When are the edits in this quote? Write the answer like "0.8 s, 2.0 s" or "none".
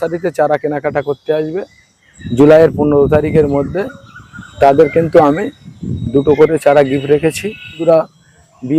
7.8 s